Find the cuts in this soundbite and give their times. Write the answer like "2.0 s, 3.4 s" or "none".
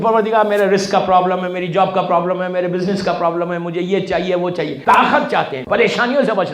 4.8 s, 5.6 s

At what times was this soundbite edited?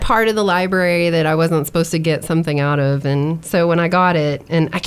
none

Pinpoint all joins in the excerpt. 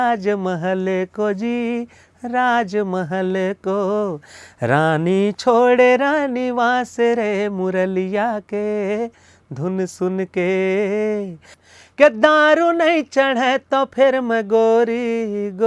11.6 s

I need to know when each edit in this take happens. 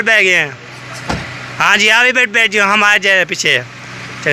none

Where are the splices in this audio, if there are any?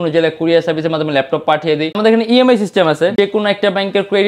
2.0 s, 3.1 s

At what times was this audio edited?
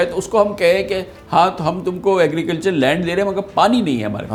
none

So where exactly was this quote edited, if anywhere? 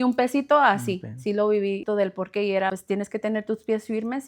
1.8 s, 2.8 s

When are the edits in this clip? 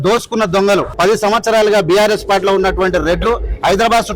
0.9 s

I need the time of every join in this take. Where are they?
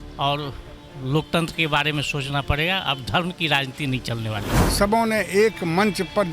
4.6 s

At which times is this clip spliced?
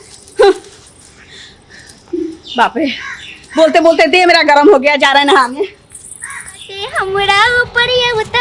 6.7 s

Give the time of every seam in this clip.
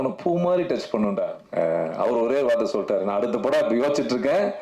1.4 s

